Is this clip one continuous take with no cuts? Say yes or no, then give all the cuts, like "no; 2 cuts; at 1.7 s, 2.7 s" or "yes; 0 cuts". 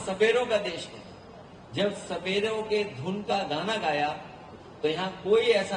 yes; 0 cuts